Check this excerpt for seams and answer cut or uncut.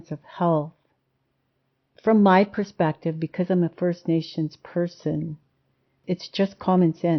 cut